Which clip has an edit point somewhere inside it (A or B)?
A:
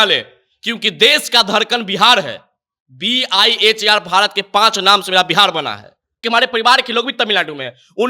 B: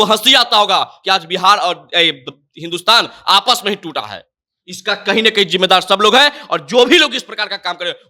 A